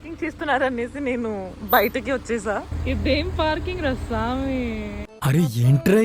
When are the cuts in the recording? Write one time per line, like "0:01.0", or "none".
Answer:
0:02.8
0:05.1